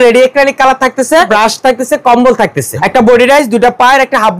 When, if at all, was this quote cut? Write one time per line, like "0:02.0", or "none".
0:01.3
0:02.6

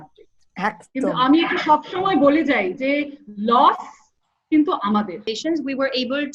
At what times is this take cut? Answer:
0:05.3

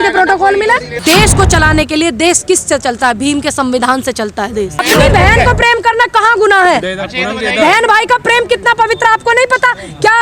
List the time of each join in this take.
0:00.9
0:04.8

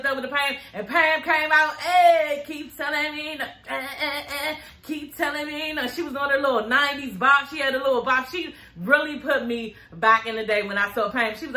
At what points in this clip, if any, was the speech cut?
none

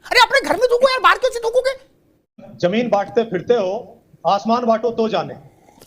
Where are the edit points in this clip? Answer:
0:02.5

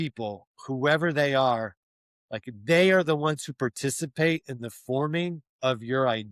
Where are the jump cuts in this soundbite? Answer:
none

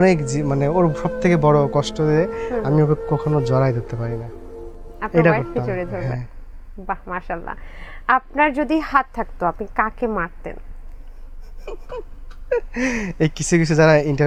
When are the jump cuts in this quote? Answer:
none

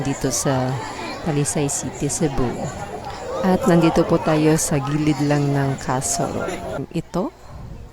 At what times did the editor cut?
0:06.8

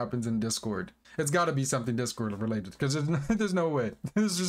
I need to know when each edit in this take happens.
0:01.0

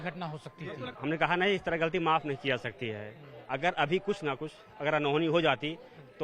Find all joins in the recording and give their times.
0:00.9

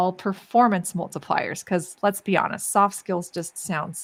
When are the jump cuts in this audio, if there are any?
none

